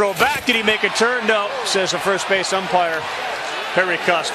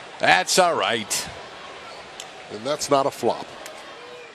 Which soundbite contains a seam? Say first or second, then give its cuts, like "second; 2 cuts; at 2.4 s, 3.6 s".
second; 1 cut; at 3.2 s